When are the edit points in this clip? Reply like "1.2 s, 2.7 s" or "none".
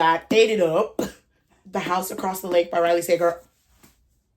1.6 s